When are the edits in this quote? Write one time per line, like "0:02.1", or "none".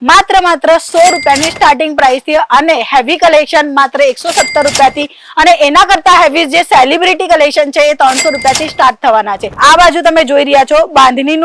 0:09.5